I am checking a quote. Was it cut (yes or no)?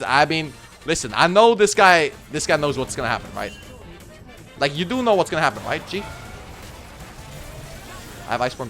no